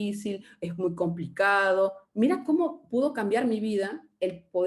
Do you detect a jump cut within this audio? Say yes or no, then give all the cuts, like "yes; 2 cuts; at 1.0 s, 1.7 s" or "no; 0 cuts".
no; 0 cuts